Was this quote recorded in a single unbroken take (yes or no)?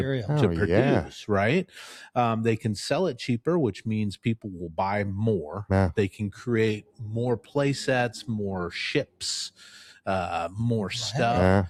yes